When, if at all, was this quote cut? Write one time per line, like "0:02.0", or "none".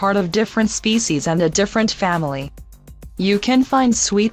0:03.4